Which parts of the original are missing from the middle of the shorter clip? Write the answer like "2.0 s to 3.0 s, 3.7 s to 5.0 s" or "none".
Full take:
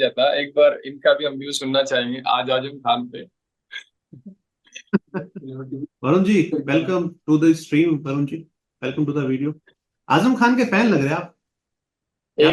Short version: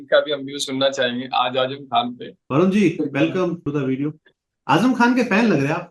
3.3 s to 5.9 s, 7.2 s to 9.1 s